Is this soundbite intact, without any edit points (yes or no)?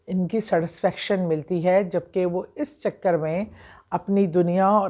yes